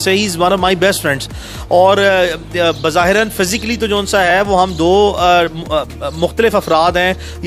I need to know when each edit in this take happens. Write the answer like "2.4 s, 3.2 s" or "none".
none